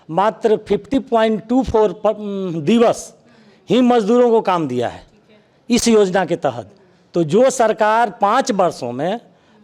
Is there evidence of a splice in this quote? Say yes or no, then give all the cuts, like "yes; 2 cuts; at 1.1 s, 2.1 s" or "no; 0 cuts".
no; 0 cuts